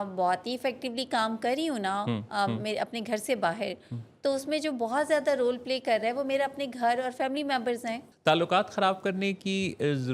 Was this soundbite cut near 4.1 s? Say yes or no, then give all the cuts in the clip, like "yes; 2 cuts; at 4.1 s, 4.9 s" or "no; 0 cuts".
no; 1 cut; at 8.1 s